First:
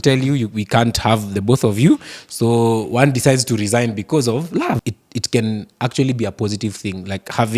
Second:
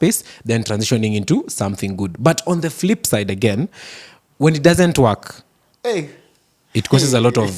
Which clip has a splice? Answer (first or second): first